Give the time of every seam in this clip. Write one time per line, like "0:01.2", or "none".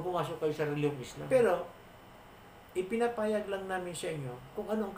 0:01.1